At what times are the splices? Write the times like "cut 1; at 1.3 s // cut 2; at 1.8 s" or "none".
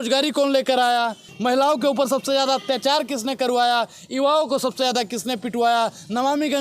cut 1; at 1.3 s